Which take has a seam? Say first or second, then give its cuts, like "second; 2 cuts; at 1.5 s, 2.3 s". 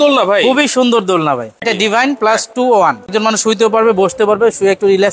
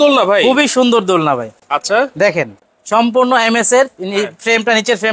first; 2 cuts; at 1.6 s, 3.1 s